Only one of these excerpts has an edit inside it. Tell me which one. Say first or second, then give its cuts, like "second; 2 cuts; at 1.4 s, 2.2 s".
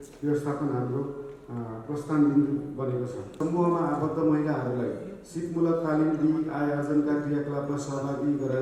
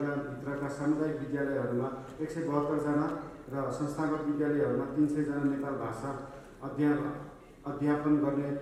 first; 1 cut; at 3.2 s